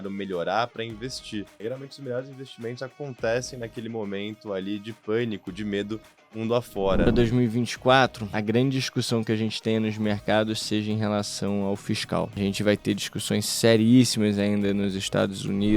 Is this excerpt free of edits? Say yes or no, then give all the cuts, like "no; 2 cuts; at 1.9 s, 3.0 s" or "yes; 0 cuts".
no; 4 cuts; at 1.5 s, 7.1 s, 8.3 s, 12.4 s